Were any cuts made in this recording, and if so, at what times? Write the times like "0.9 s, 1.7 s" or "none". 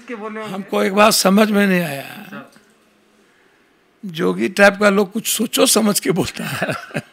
none